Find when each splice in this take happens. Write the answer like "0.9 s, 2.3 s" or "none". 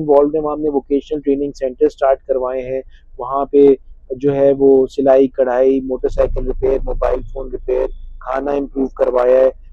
none